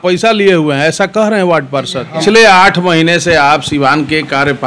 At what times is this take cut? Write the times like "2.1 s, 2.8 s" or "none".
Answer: 2.2 s